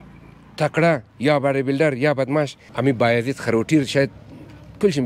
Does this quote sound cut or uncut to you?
cut